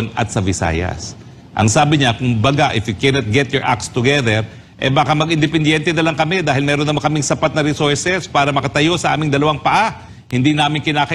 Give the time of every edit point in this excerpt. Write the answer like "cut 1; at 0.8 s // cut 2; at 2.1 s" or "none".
none